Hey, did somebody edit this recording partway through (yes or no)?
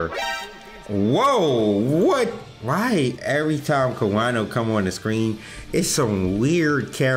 no